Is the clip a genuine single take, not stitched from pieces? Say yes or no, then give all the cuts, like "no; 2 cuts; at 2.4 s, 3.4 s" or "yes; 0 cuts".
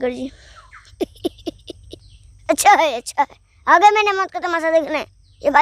yes; 0 cuts